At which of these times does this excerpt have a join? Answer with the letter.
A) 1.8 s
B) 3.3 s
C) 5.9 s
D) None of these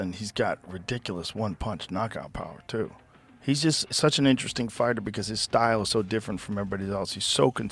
D